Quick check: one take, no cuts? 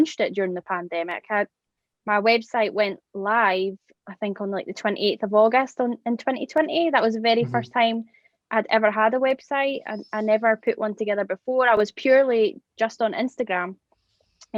no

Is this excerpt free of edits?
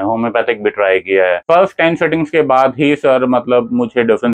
no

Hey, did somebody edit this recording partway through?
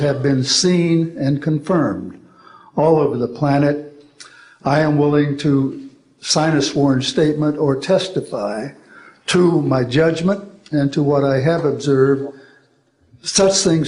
no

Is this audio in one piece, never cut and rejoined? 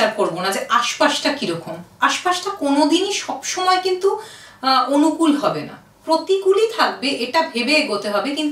yes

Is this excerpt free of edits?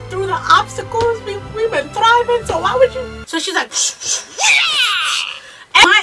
no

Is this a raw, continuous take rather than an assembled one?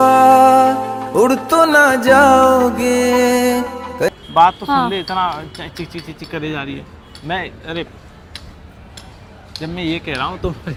yes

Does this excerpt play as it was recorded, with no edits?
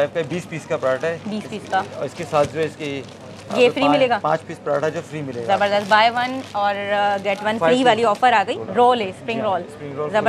no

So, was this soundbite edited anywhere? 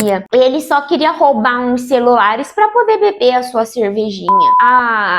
yes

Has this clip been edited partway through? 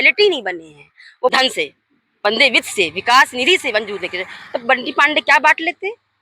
yes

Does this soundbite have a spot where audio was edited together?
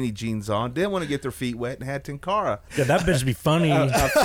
yes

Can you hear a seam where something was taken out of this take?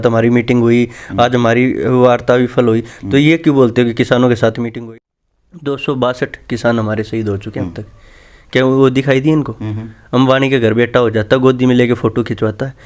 yes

